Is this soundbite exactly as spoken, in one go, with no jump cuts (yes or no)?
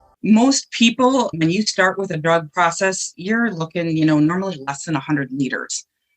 no